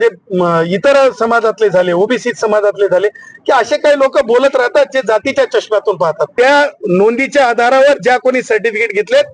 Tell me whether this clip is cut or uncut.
cut